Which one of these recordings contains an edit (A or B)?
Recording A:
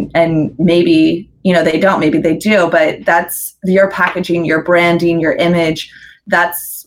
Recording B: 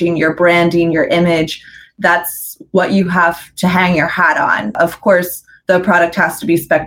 B